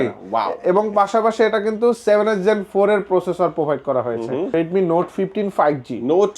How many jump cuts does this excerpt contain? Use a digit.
1